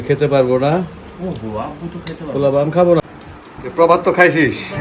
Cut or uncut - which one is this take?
cut